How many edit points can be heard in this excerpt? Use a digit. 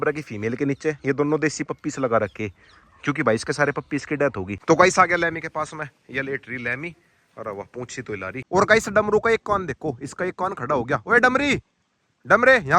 2